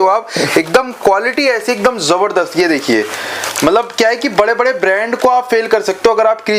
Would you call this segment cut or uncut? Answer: uncut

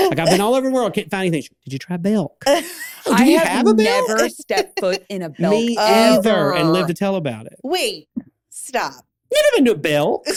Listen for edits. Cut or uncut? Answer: uncut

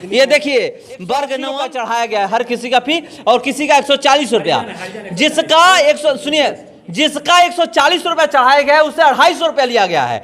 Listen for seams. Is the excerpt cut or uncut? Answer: cut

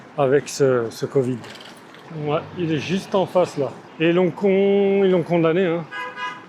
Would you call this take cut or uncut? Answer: uncut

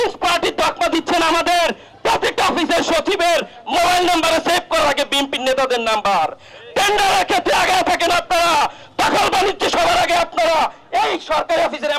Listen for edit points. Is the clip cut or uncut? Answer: uncut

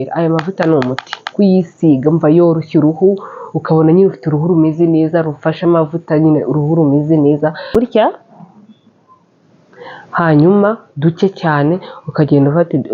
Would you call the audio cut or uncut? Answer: cut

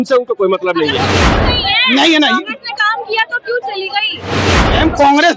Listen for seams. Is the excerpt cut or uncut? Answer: cut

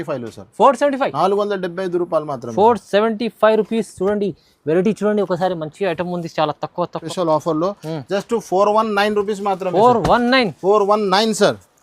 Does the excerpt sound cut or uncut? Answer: cut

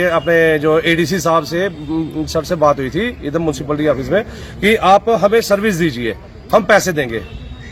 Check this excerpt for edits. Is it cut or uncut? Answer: uncut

